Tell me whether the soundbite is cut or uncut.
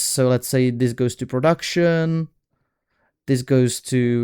uncut